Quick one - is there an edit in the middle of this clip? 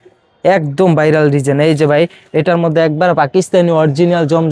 no; 0 cuts

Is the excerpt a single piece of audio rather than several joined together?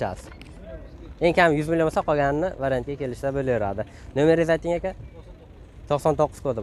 yes; 0 cuts

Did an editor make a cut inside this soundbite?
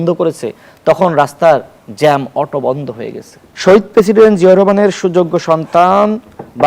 yes; 1 cut; at 3.4 s

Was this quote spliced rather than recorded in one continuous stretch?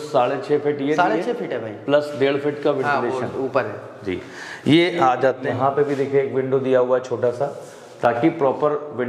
yes; 1 cut; at 5.5 s

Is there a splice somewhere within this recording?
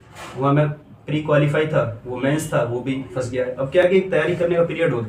no; 0 cuts

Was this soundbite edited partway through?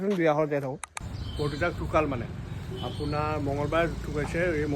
yes; 1 cut; at 1.1 s

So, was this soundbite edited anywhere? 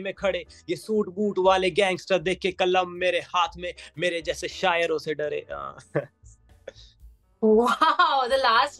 no; 0 cuts

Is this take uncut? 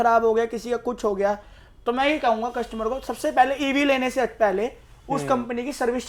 yes; 0 cuts

